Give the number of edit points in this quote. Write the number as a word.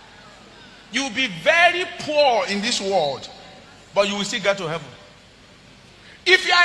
one